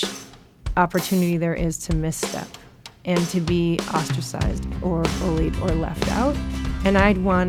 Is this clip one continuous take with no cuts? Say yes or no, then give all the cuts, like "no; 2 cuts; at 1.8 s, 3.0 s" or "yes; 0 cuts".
yes; 0 cuts